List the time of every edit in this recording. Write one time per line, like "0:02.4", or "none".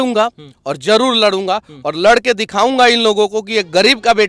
none